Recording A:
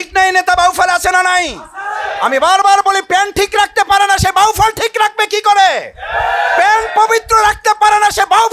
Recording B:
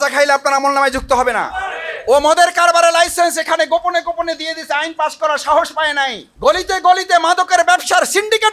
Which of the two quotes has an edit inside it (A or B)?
B